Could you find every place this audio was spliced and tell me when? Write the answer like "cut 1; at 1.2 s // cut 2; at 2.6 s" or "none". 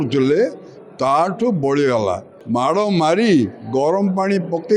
cut 1; at 2.3 s